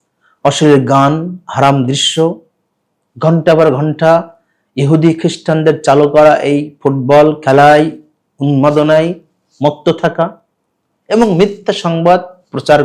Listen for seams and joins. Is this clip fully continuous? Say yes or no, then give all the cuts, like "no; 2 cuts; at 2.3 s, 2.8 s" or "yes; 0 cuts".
yes; 0 cuts